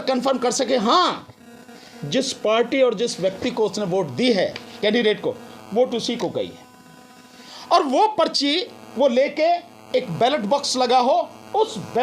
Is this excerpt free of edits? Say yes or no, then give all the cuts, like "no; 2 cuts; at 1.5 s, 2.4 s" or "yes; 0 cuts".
yes; 0 cuts